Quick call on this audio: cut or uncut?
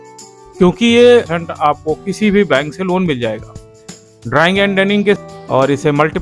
cut